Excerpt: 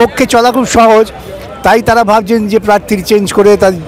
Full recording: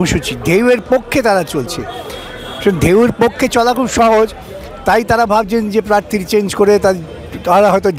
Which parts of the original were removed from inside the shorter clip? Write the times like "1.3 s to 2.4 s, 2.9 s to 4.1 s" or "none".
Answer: none